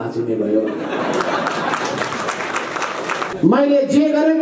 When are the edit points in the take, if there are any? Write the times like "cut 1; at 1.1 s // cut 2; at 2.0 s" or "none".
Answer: cut 1; at 3.3 s